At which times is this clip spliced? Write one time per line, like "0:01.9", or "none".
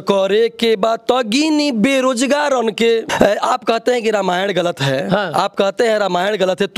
0:03.0